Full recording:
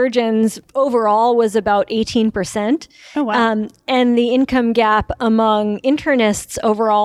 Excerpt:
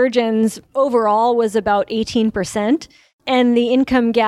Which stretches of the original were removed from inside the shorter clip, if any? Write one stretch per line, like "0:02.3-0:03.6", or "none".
0:03.1-0:03.7